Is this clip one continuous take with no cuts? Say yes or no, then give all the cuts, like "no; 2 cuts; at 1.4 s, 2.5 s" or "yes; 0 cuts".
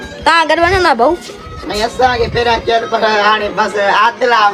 yes; 0 cuts